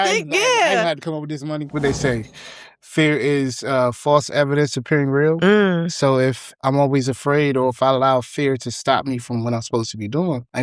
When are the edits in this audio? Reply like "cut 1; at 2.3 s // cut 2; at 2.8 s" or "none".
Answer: cut 1; at 1.7 s // cut 2; at 6.5 s

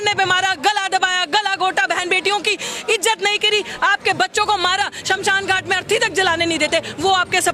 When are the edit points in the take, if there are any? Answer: none

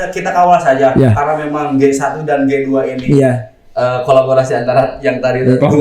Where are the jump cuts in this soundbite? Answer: none

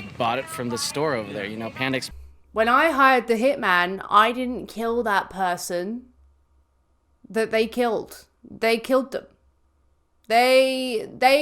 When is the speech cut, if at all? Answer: cut 1; at 2.1 s

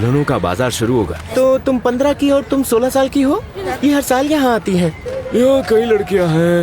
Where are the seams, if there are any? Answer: cut 1; at 1.2 s // cut 2; at 3.6 s // cut 3; at 5.1 s

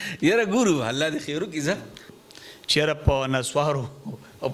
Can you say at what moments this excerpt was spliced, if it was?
cut 1; at 2.2 s

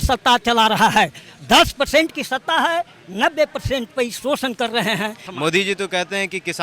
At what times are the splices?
cut 1; at 5.2 s

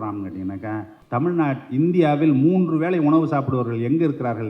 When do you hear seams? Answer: cut 1; at 0.9 s

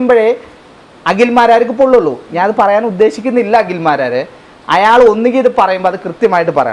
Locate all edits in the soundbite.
none

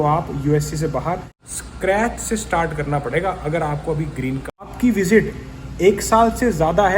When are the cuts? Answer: cut 1; at 1.4 s // cut 2; at 4.7 s

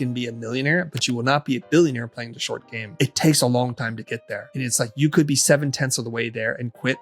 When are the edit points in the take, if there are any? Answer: cut 1; at 2.8 s // cut 2; at 4.6 s

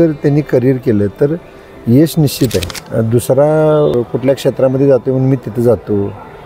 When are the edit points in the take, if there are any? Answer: cut 1; at 2.7 s // cut 2; at 3.9 s

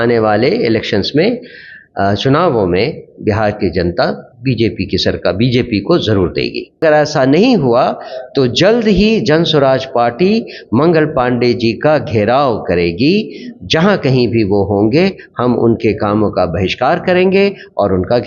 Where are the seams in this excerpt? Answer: cut 1; at 6.8 s

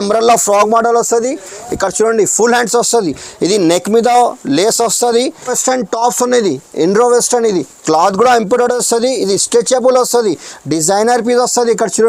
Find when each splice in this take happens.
cut 1; at 5.6 s

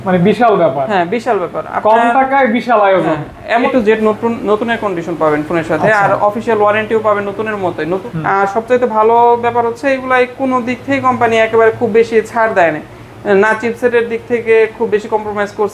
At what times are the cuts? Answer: cut 1; at 3.7 s // cut 2; at 8.0 s

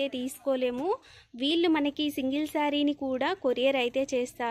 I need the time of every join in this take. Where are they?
none

